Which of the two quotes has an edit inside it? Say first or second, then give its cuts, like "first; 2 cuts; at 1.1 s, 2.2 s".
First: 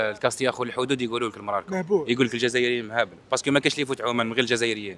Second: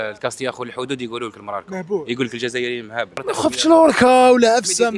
second; 1 cut; at 3.2 s